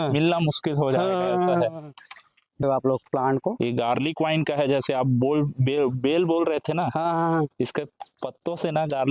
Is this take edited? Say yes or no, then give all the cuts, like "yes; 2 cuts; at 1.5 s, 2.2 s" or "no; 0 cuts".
yes; 1 cut; at 2.6 s